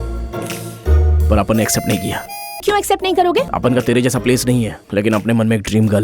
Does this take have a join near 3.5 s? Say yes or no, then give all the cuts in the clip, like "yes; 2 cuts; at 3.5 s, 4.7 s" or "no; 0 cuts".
yes; 3 cuts; at 2.6 s, 3.5 s, 4.8 s